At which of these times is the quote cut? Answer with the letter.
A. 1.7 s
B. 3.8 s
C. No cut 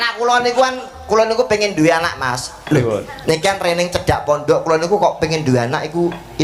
C